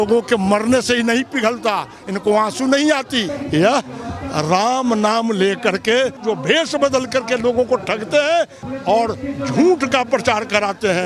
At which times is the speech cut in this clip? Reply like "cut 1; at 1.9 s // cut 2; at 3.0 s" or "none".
cut 1; at 3.4 s // cut 2; at 6.2 s // cut 3; at 8.6 s